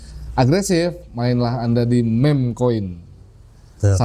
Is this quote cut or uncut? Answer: uncut